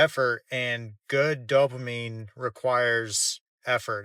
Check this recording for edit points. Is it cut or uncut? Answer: uncut